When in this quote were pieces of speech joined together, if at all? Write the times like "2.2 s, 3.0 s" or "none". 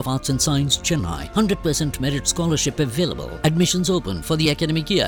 none